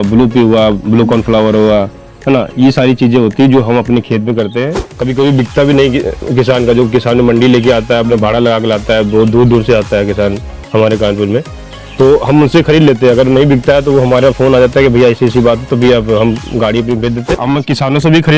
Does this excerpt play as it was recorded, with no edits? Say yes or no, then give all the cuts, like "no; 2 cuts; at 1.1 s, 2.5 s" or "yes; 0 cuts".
no; 2 cuts; at 4.9 s, 17.3 s